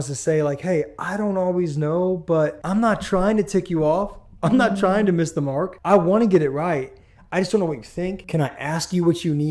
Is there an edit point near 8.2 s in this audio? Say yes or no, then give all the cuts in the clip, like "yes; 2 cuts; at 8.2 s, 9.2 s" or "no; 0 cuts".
yes; 3 cuts; at 2.6 s, 5.7 s, 8.2 s